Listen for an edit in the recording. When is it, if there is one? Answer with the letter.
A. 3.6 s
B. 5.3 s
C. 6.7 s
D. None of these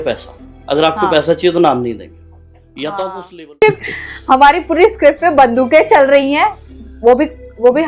A